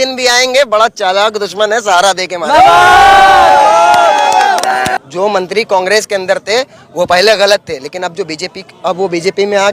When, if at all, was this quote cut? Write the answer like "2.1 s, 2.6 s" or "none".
5.0 s